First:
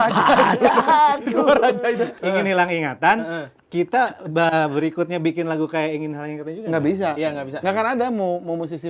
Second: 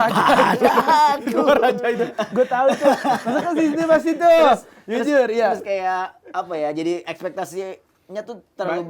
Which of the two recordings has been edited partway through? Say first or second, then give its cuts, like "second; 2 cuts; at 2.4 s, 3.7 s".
first; 1 cut; at 2.1 s